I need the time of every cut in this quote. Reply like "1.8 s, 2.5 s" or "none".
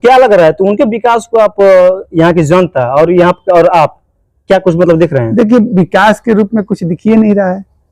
none